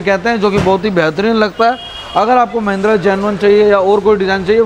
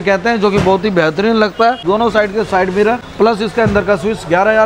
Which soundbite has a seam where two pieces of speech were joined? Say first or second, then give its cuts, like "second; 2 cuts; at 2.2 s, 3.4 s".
second; 2 cuts; at 1.8 s, 3.1 s